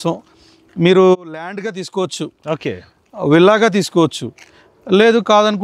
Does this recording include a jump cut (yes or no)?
no